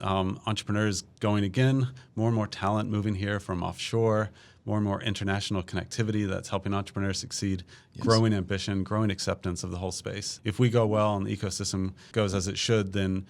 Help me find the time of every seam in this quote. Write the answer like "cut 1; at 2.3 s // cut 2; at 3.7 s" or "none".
cut 1; at 10.3 s // cut 2; at 12.0 s